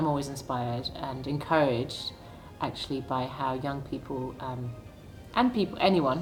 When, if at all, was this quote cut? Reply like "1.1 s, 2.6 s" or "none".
none